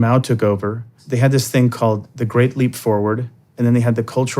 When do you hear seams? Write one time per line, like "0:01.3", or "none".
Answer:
0:01.0